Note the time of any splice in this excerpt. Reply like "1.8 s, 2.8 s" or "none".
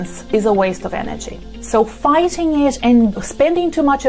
3.1 s